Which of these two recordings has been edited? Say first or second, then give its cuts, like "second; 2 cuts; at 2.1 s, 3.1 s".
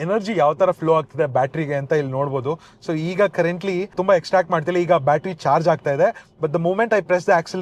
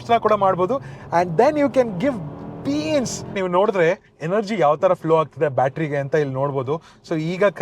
second; 1 cut; at 3.3 s